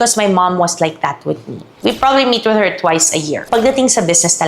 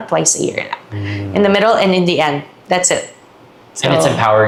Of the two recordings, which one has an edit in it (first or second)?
first